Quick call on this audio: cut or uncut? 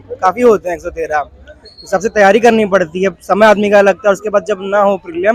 uncut